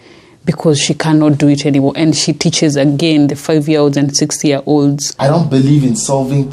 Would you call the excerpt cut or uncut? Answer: cut